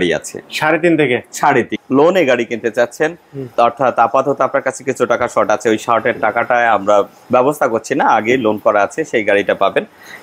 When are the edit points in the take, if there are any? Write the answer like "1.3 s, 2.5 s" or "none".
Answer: 1.8 s

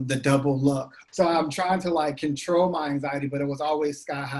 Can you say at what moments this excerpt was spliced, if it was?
1.0 s

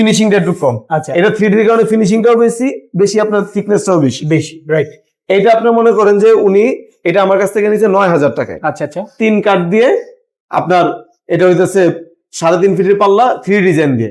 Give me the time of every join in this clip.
none

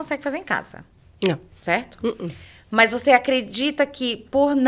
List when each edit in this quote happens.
none

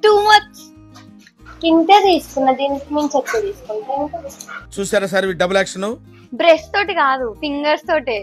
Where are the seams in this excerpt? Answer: none

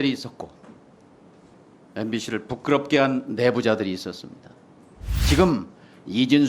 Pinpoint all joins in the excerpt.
1.5 s

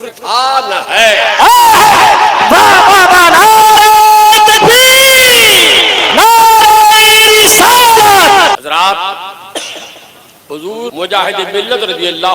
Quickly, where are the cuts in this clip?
8.6 s, 10.9 s

